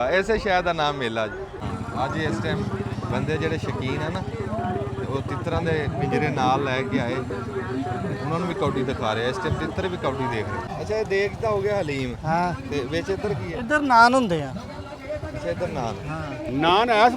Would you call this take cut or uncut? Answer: cut